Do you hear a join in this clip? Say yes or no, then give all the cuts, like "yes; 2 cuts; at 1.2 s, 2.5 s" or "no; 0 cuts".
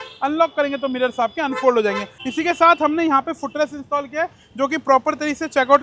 yes; 1 cut; at 2.1 s